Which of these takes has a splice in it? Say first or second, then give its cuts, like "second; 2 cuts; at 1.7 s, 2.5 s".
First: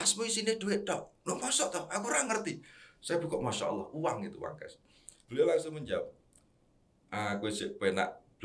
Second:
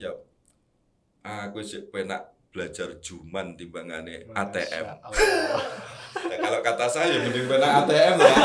first; 1 cut; at 4.9 s